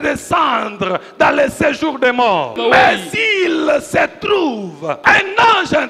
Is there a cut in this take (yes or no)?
yes